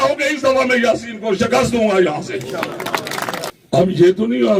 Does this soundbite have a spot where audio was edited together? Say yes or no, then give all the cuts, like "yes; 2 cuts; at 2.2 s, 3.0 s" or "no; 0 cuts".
yes; 1 cut; at 3.5 s